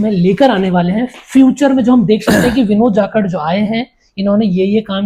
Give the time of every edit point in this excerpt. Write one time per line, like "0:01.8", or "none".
none